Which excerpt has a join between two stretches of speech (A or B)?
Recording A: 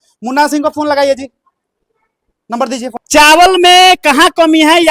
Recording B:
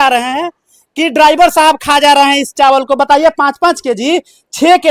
A